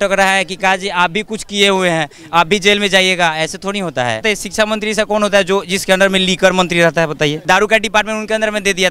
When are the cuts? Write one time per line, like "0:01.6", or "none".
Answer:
0:04.2
0:07.4